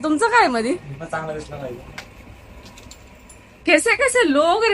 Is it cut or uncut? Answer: uncut